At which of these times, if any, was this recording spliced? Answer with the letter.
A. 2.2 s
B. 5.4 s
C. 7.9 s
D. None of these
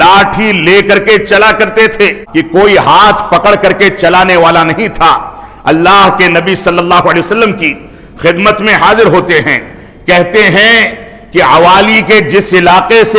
A